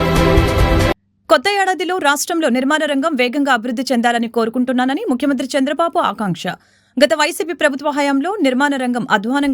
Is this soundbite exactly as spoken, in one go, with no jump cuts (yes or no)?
no